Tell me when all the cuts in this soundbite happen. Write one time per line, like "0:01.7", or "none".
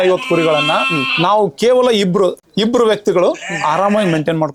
none